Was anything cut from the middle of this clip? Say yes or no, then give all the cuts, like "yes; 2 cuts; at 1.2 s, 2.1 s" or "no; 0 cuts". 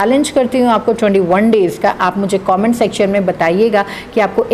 no; 0 cuts